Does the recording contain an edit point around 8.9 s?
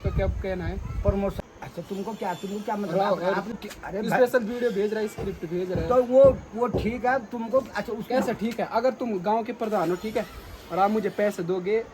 no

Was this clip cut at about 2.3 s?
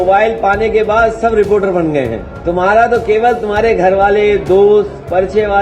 yes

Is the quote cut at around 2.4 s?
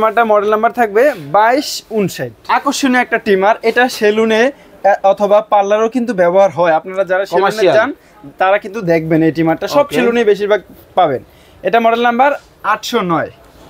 yes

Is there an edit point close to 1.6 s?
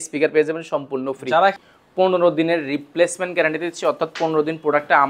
yes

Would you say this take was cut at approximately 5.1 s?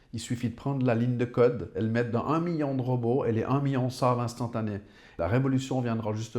yes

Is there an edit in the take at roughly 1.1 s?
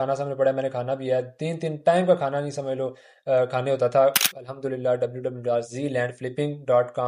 no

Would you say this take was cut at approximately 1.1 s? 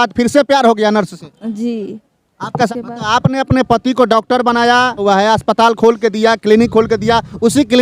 no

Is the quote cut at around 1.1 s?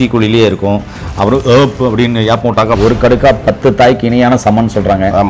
no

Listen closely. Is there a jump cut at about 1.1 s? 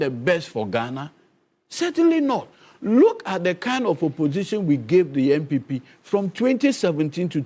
no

